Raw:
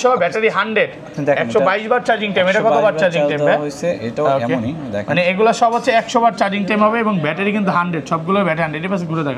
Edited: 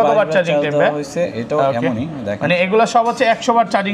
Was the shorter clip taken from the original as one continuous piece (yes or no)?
yes